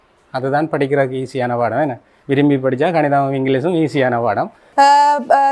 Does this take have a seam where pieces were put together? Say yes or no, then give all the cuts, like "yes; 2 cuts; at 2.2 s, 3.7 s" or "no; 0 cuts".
yes; 1 cut; at 4.6 s